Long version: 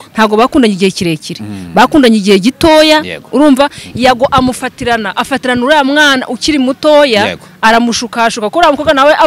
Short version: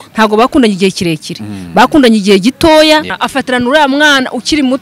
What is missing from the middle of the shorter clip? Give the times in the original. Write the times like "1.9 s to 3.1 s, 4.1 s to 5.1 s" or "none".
3.2 s to 5.1 s

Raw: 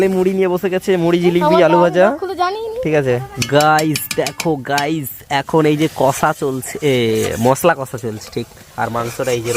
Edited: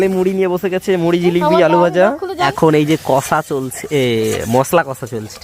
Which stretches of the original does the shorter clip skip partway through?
2.5 s to 5.4 s

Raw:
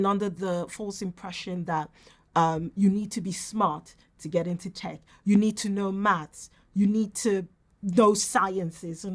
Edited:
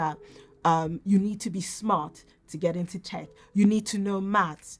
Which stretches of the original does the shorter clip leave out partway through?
none

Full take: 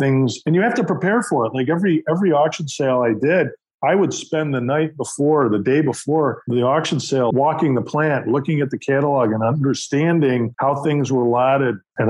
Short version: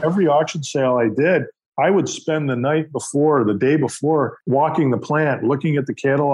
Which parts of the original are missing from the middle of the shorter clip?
6.5 s to 7.3 s

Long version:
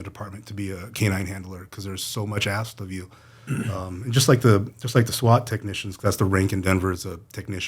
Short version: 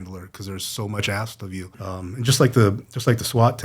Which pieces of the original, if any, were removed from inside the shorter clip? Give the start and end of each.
3.2 s to 3.7 s

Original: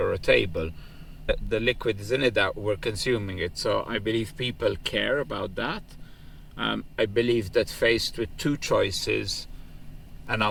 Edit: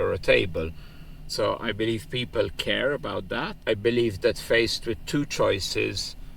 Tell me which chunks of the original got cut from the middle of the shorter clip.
1.2 s to 3.4 s, 5.8 s to 6.9 s

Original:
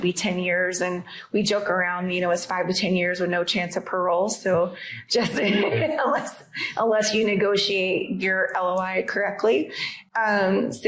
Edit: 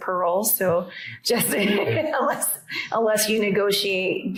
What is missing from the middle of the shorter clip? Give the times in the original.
none

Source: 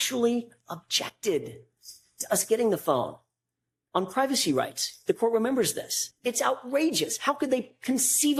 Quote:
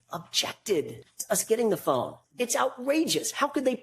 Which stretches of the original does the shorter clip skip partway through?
1.6 s to 2.1 s, 3.2 s to 6.1 s

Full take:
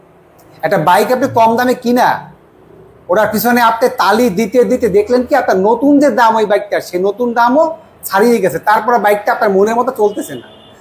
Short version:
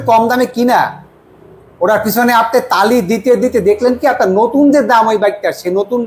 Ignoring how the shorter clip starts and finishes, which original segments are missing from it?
none

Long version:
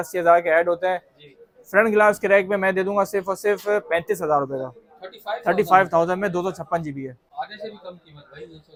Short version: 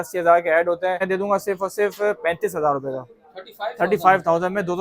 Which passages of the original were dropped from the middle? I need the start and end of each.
1.0 s to 2.7 s

